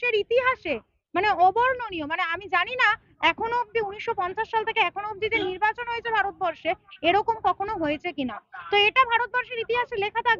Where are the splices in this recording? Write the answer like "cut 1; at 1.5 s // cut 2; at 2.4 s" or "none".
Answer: none